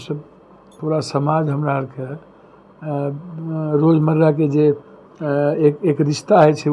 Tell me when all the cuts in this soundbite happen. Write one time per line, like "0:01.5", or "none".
none